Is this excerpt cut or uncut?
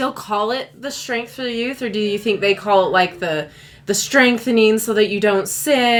uncut